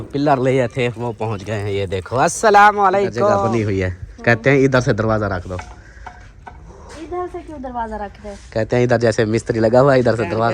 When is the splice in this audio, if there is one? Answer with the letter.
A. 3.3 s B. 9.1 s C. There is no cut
A